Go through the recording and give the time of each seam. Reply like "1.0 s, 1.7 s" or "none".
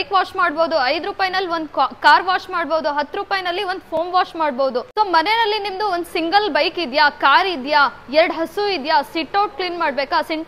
4.9 s